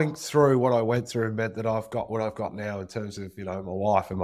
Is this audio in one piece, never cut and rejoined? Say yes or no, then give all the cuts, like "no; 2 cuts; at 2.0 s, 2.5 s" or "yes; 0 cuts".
yes; 0 cuts